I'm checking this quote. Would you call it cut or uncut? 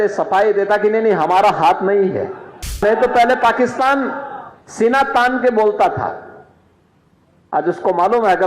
cut